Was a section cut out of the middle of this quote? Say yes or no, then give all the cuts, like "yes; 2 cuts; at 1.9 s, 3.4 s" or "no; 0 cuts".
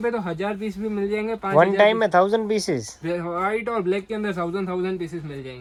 no; 0 cuts